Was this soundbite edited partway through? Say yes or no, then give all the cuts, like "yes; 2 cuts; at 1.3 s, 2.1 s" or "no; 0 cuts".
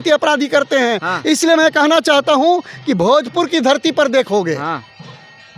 no; 0 cuts